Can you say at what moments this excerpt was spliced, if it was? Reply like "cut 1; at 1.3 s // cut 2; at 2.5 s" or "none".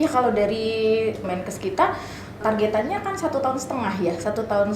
cut 1; at 1.3 s // cut 2; at 2.4 s